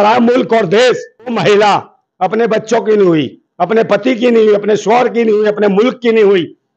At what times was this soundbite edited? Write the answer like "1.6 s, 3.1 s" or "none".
1.4 s